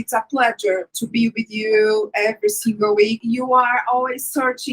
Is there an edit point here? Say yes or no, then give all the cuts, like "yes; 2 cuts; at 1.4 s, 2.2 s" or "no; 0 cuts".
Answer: yes; 2 cuts; at 0.9 s, 3.2 s